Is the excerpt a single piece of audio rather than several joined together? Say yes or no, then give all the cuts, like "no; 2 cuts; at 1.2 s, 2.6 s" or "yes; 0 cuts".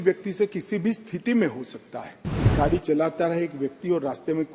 no; 1 cut; at 2.5 s